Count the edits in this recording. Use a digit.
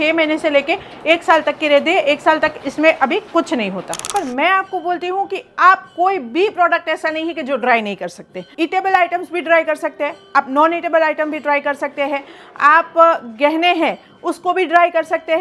2